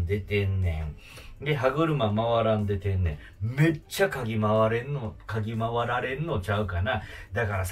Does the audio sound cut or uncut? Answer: uncut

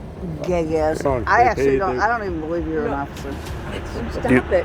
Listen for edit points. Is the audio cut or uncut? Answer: cut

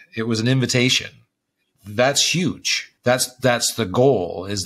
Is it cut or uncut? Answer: uncut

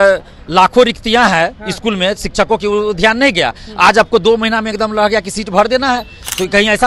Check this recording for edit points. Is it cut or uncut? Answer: uncut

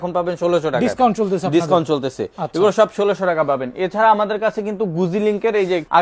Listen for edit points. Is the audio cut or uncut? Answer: uncut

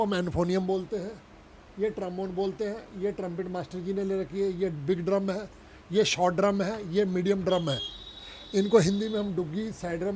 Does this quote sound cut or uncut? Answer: uncut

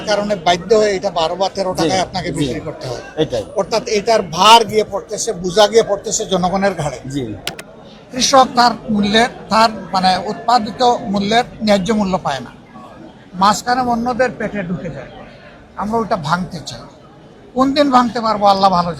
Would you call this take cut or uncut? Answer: cut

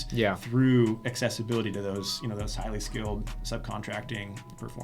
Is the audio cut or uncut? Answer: uncut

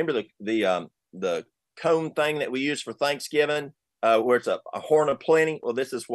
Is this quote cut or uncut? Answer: uncut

